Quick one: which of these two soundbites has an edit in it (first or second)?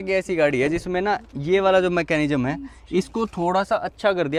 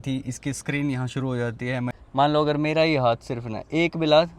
second